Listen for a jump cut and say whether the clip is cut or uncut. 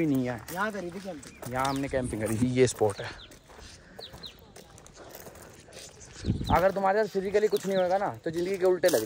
uncut